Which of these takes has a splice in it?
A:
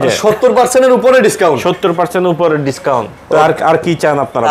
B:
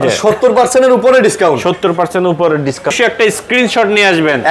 B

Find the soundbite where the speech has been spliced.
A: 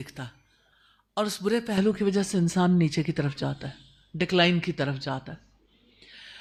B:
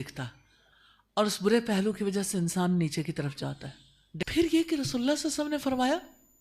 B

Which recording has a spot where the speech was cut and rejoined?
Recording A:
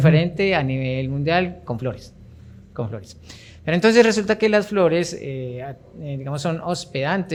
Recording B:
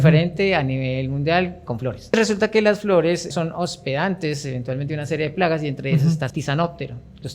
B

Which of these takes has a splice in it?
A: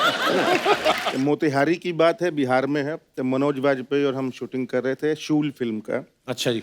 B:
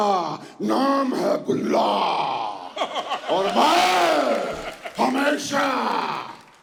A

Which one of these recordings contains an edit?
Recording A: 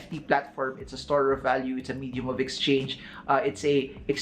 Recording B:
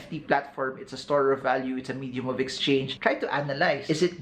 B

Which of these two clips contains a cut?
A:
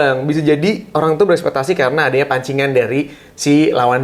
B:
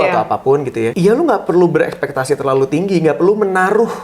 B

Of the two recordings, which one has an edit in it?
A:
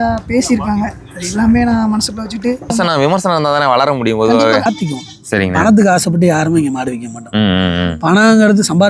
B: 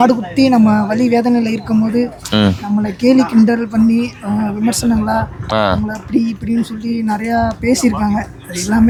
A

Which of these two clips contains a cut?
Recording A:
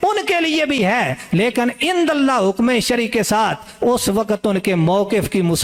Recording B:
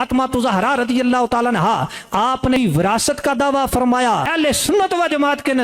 B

